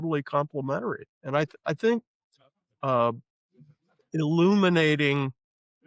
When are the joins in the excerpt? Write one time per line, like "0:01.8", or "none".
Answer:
0:01.1